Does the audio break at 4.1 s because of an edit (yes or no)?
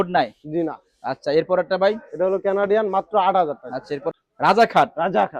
yes